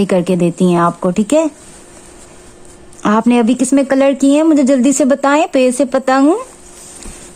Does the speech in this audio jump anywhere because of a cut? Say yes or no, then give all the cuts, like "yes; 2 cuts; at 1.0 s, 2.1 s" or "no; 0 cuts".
no; 0 cuts